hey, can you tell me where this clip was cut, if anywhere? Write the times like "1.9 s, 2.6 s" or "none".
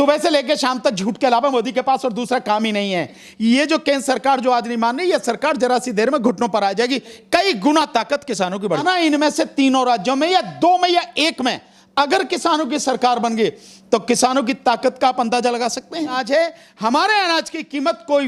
3.2 s, 8.8 s, 16.2 s